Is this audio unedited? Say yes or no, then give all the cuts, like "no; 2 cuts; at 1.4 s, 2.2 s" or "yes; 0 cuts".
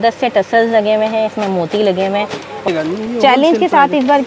no; 1 cut; at 2.7 s